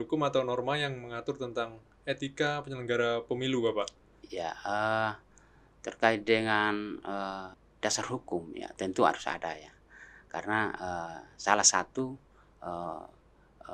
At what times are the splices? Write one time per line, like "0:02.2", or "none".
0:07.6